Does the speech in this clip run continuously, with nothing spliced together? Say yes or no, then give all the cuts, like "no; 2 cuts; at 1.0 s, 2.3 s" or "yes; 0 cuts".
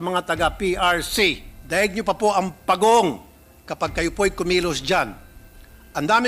no; 1 cut; at 1.5 s